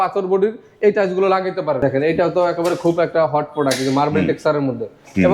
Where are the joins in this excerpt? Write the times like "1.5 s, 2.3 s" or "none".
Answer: 1.8 s